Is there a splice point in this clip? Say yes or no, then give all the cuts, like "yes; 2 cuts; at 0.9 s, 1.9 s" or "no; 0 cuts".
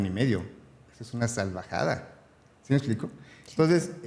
no; 0 cuts